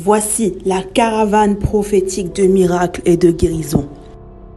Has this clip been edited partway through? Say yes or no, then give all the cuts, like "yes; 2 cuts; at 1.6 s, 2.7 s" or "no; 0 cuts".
no; 0 cuts